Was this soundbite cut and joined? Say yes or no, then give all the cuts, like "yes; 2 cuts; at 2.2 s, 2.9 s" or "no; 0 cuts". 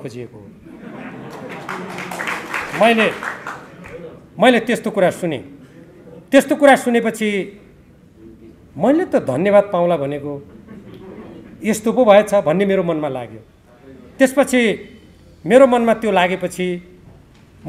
no; 0 cuts